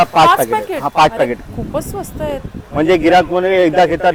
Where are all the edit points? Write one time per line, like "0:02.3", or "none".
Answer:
none